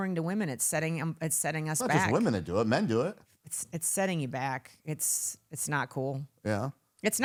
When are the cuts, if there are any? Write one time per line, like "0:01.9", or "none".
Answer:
none